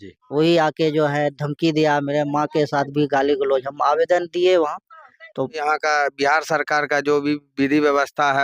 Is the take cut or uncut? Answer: cut